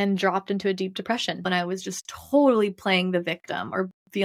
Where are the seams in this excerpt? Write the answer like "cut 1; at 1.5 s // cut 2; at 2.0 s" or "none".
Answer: cut 1; at 1.5 s